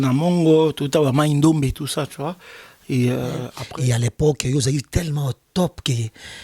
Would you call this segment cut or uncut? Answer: cut